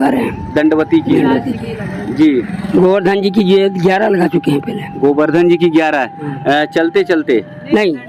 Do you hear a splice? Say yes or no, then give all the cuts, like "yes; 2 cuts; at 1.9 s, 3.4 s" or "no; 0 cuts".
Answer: no; 0 cuts